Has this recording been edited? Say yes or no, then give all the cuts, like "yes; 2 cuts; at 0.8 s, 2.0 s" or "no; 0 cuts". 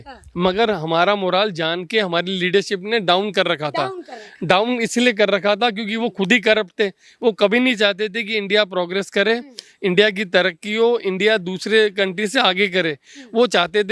no; 0 cuts